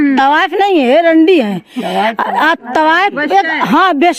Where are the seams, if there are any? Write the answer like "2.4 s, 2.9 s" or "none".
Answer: none